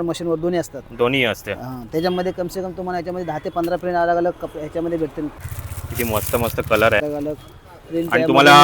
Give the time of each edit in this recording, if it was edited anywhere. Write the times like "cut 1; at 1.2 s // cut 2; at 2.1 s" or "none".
cut 1; at 5.4 s // cut 2; at 7.0 s